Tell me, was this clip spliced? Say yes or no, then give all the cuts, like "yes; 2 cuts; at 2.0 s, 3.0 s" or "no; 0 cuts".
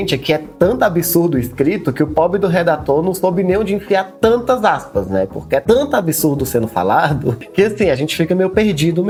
no; 0 cuts